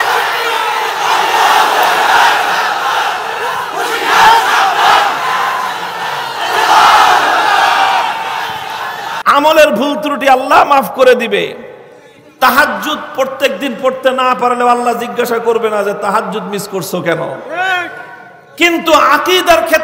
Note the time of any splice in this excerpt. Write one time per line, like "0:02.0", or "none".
0:09.2